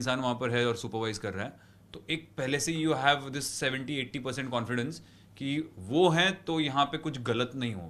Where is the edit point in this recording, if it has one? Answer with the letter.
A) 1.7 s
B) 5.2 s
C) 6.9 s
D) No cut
D